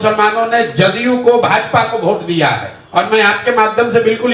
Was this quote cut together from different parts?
yes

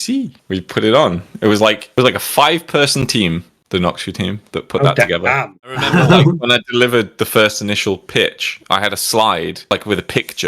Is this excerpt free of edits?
no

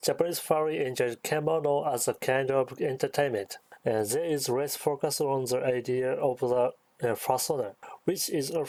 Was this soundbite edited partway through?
no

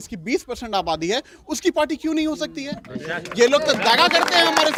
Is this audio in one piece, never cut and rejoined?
yes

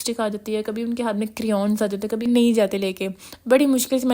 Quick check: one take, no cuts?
no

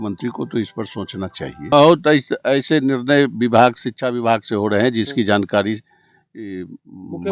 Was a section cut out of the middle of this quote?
yes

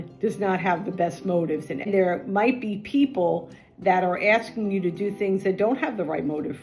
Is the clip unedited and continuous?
no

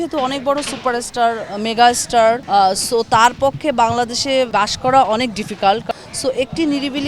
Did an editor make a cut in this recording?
yes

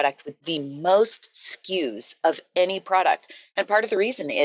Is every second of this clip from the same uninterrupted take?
yes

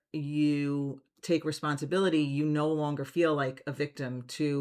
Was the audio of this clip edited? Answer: no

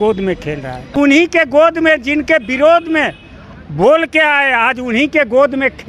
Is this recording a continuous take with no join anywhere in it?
no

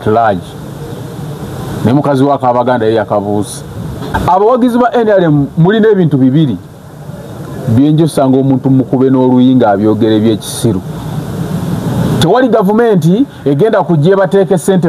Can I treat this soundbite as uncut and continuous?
no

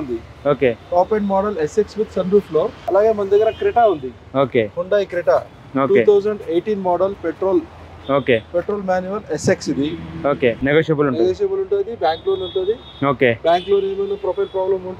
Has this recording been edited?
yes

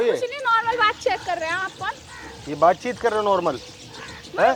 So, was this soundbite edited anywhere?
no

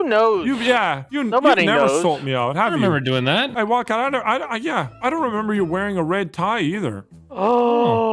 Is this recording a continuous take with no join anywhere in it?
no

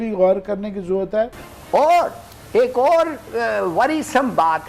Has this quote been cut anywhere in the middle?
yes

